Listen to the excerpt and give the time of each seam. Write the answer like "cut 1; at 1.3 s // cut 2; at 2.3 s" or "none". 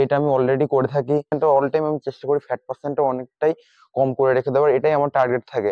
cut 1; at 1.3 s